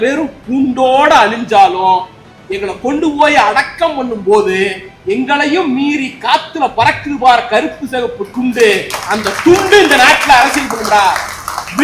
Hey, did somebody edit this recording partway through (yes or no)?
no